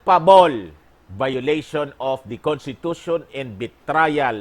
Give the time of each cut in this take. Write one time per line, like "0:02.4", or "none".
0:01.3